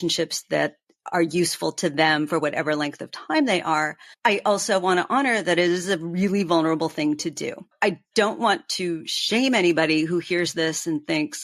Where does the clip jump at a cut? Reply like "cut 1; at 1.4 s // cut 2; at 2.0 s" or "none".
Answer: cut 1; at 7.6 s